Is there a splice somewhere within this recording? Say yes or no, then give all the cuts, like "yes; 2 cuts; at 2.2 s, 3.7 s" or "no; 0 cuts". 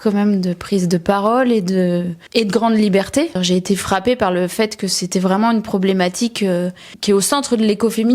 yes; 2 cuts; at 2.2 s, 3.4 s